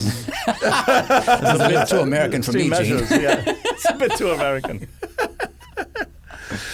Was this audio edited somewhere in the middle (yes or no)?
no